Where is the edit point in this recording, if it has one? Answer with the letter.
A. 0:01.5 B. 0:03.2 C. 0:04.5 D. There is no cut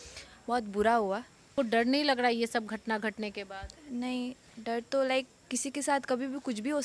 A